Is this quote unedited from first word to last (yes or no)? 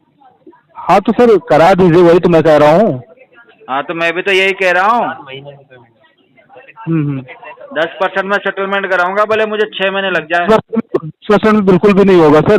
yes